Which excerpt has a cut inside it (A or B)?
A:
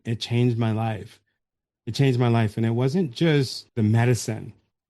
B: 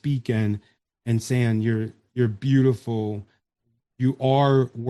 A